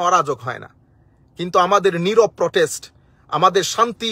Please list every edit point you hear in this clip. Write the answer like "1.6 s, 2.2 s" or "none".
none